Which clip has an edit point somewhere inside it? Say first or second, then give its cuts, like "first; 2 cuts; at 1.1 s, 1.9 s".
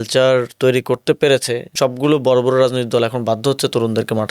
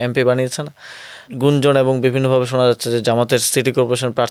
first; 1 cut; at 1.7 s